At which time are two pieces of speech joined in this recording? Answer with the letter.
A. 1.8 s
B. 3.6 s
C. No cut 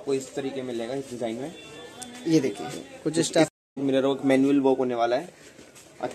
B